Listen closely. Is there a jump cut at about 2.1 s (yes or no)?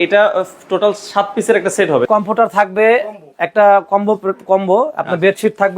yes